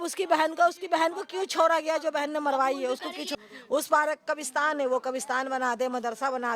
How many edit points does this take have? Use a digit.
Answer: 1